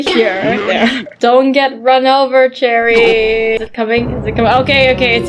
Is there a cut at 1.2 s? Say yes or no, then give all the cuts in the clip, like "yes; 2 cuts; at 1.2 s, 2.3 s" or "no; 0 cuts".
yes; 2 cuts; at 1.2 s, 3.6 s